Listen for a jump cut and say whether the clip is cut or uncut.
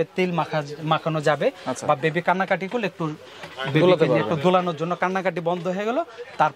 uncut